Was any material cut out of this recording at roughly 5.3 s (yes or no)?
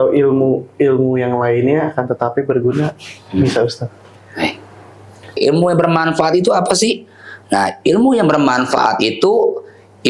yes